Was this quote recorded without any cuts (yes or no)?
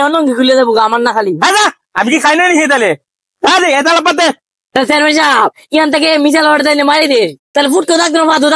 no